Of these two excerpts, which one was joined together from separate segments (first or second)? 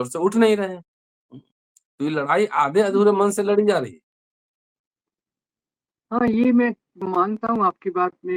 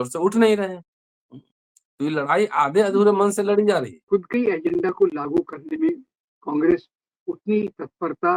second